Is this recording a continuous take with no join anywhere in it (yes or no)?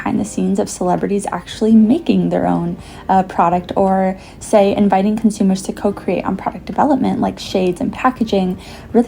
yes